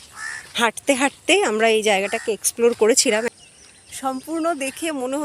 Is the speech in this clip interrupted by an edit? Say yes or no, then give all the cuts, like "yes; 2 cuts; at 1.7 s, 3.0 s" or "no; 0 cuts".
yes; 1 cut; at 3.3 s